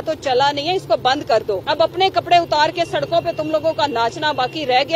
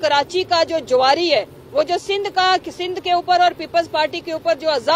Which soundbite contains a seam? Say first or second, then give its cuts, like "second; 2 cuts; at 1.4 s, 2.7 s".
first; 1 cut; at 1.6 s